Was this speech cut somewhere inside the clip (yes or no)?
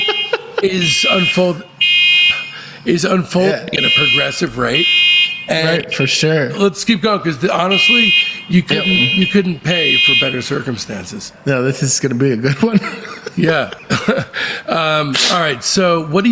yes